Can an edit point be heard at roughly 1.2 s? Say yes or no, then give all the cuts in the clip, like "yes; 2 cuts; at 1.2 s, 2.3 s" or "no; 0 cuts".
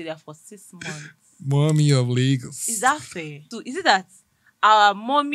no; 1 cut; at 3.5 s